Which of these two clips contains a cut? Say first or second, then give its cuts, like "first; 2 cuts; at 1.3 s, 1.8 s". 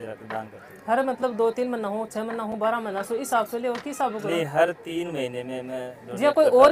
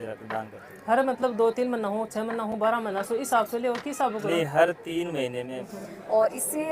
second; 1 cut; at 5.6 s